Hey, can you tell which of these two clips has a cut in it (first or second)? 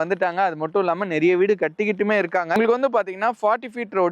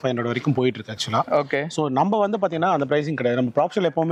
first